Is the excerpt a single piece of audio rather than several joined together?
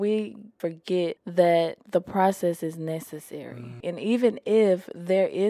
no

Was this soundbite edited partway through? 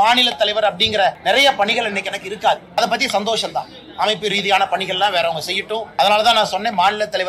yes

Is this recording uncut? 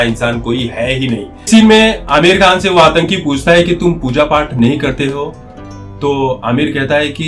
no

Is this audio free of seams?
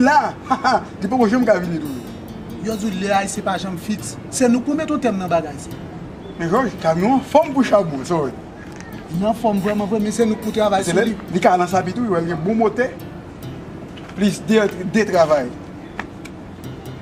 yes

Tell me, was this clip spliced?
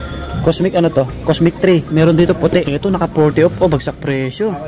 yes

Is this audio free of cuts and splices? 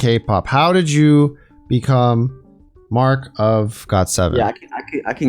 yes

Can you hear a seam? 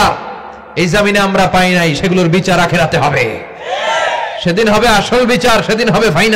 no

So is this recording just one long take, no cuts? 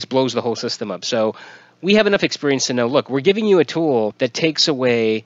no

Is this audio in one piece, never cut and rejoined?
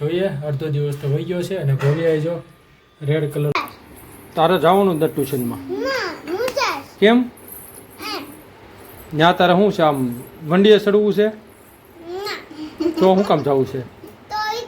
no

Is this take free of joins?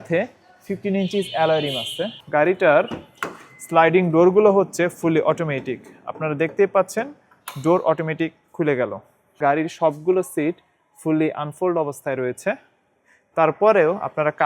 no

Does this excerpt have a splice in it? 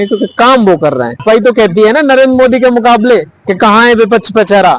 yes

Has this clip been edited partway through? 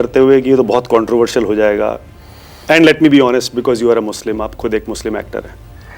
no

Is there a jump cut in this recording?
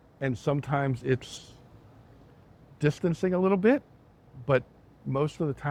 no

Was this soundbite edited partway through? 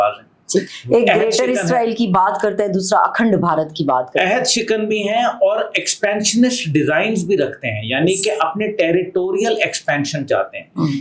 no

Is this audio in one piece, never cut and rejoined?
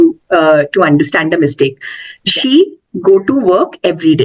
yes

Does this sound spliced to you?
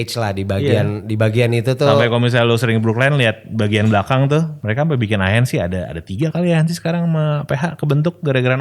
yes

